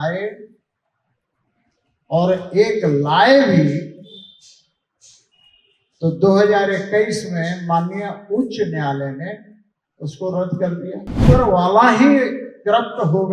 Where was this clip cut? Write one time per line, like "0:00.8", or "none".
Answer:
0:11.2